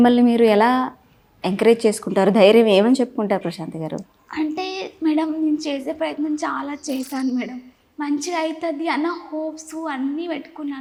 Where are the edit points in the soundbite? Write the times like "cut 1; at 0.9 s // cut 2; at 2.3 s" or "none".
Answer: none

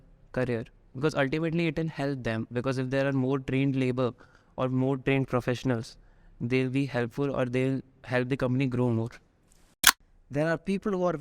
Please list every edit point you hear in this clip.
cut 1; at 9.8 s

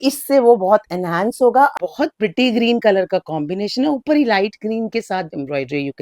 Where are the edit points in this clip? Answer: cut 1; at 1.7 s

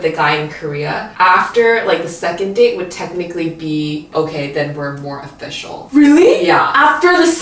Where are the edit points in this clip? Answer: cut 1; at 1.1 s // cut 2; at 4.1 s // cut 3; at 5.8 s

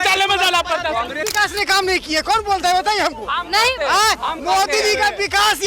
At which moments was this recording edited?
cut 1; at 1.3 s

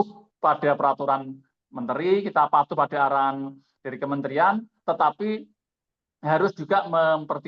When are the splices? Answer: none

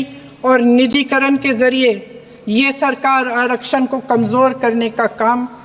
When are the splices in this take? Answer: none

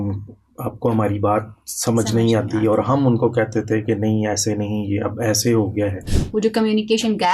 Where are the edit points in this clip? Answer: cut 1; at 6.1 s

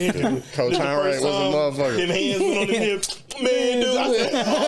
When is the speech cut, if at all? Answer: none

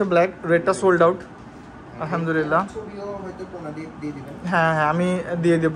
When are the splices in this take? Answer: none

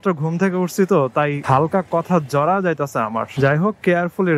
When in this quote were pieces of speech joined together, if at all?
cut 1; at 1.4 s // cut 2; at 3.3 s

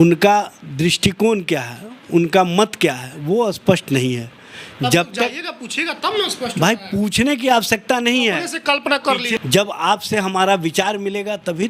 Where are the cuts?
cut 1; at 9.3 s

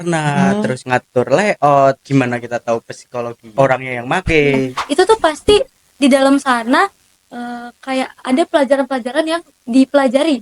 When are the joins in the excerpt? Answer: cut 1; at 0.8 s // cut 2; at 2.0 s // cut 3; at 3.5 s // cut 4; at 4.8 s

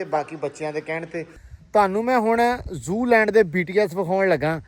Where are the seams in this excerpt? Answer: cut 1; at 1.4 s

